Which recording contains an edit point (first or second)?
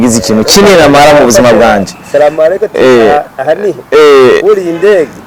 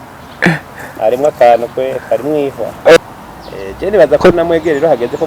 second